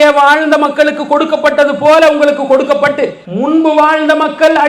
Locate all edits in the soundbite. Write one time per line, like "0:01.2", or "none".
0:03.2